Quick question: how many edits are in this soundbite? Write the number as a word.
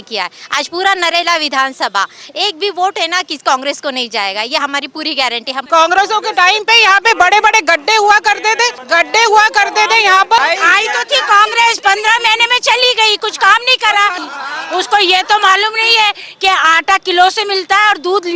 four